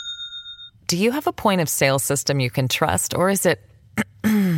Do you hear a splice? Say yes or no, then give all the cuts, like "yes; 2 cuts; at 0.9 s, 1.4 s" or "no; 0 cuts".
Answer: no; 0 cuts